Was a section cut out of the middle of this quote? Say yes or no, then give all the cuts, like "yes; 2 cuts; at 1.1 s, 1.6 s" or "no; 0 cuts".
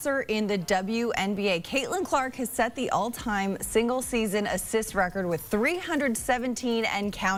no; 0 cuts